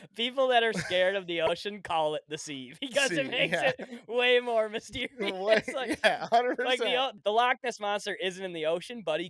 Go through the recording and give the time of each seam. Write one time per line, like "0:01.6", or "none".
0:07.2